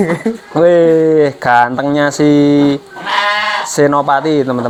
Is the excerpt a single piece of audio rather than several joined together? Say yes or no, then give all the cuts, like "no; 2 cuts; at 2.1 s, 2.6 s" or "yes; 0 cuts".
yes; 0 cuts